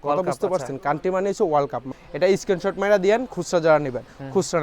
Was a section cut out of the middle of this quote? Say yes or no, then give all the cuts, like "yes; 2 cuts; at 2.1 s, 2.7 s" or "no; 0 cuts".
yes; 1 cut; at 1.9 s